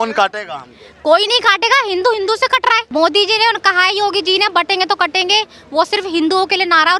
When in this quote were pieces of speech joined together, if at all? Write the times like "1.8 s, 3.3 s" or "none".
2.8 s